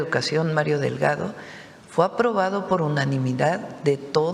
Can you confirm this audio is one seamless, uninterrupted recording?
yes; 0 cuts

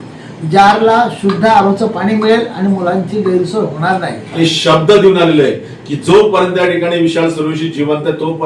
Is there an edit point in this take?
yes; 1 cut; at 4.4 s

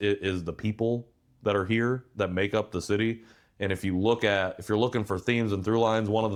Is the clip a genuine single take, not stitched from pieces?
yes; 0 cuts

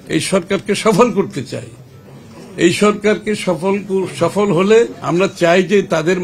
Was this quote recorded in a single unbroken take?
no; 1 cut; at 5.0 s

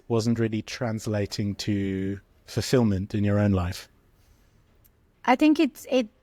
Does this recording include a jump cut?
no; 0 cuts

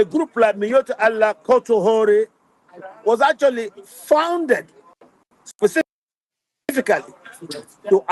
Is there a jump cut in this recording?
no; 0 cuts

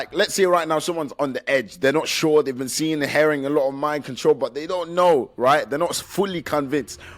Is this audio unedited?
yes; 0 cuts

